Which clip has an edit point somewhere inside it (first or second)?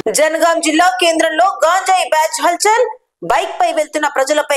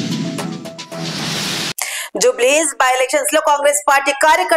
second